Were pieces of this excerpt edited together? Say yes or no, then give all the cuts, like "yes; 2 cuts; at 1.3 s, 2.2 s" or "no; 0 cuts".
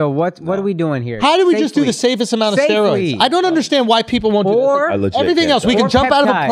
yes; 1 cut; at 1.2 s